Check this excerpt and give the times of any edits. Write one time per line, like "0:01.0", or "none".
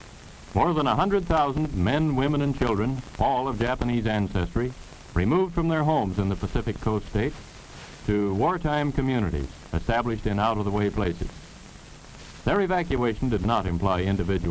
none